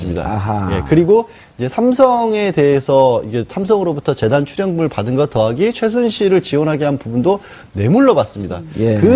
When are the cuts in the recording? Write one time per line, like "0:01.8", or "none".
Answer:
0:03.9